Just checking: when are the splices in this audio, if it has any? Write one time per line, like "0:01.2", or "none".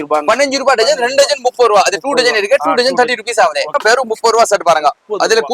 0:03.8